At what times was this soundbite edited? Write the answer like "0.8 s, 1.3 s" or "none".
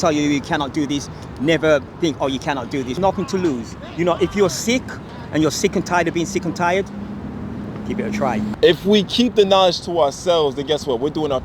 2.9 s, 8.5 s